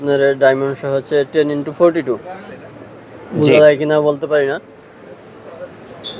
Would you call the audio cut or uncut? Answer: uncut